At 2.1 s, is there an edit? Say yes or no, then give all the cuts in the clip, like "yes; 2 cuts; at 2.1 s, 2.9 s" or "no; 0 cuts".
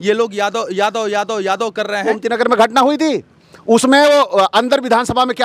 yes; 1 cut; at 2.1 s